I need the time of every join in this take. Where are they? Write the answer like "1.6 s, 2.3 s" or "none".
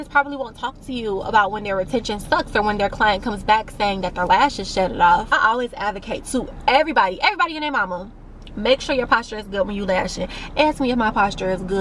5.3 s